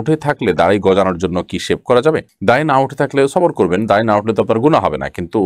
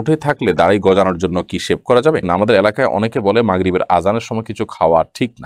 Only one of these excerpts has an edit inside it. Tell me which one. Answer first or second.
second